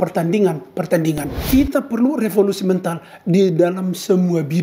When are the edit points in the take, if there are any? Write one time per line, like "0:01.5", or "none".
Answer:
0:01.3